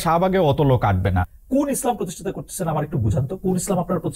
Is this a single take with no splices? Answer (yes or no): no